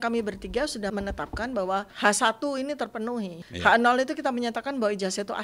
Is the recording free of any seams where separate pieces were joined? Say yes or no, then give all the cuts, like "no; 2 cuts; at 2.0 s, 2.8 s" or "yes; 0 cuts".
no; 3 cuts; at 0.9 s, 1.9 s, 3.4 s